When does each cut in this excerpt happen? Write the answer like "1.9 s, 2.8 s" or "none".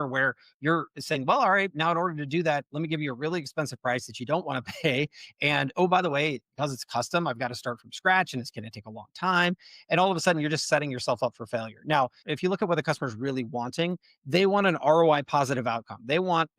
12.2 s